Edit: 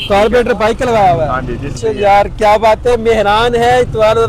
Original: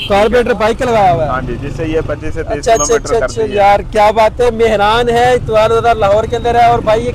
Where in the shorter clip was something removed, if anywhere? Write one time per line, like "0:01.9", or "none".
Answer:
0:01.8